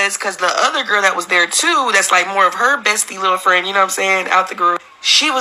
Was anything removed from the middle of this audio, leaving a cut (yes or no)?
no